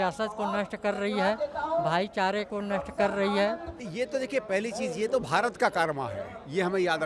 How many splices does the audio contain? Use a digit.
1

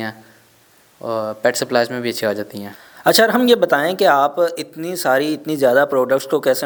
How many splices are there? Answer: 0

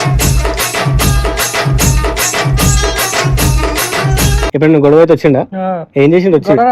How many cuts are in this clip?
1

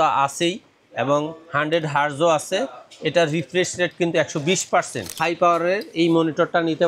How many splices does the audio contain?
1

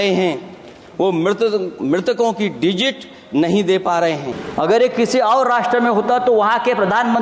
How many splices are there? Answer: 1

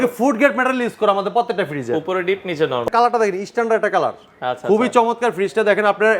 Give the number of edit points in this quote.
1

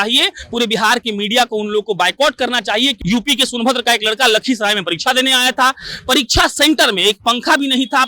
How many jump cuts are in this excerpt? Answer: 1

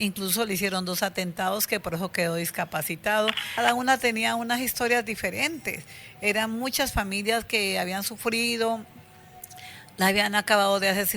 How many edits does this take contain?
1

